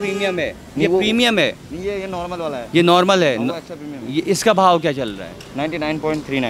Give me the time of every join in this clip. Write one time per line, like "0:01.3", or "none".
none